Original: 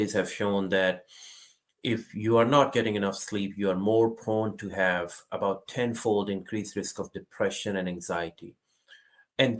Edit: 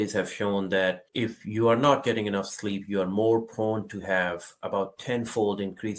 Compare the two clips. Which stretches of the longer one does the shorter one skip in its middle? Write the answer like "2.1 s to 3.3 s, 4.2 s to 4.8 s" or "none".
1.1 s to 1.7 s